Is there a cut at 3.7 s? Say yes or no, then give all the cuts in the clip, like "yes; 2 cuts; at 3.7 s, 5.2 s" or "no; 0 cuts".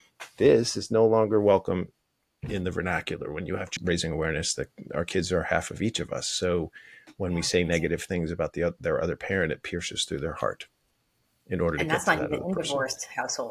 yes; 1 cut; at 3.7 s